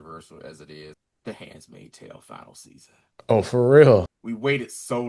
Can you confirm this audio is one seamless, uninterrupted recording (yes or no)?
no